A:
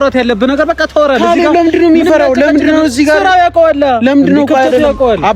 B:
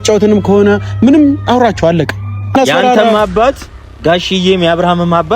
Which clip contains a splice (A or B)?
B